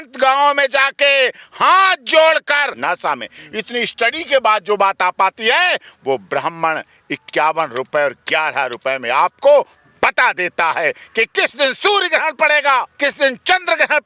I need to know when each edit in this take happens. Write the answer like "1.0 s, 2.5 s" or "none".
2.8 s, 12.9 s

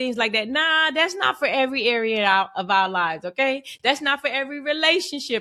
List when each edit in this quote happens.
none

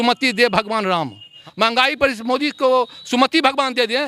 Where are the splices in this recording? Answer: 1.3 s

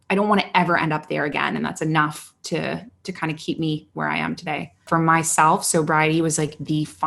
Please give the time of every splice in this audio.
4.8 s

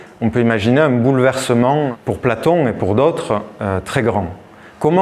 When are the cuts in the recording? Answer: 1.9 s

